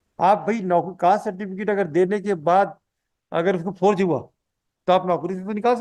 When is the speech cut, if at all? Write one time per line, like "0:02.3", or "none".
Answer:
none